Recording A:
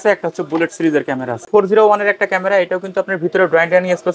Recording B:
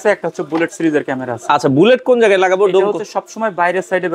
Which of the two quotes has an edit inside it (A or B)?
A